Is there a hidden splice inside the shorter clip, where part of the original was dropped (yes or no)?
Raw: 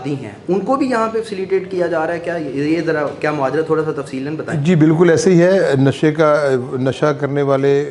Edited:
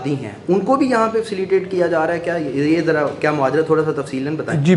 no